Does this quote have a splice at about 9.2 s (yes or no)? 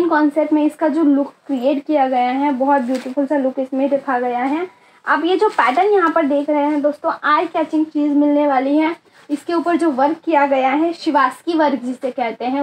no